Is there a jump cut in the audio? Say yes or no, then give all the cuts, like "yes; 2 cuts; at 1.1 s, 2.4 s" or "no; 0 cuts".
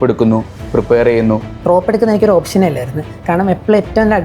yes; 1 cut; at 1.5 s